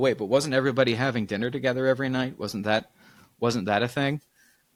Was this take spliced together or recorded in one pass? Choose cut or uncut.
uncut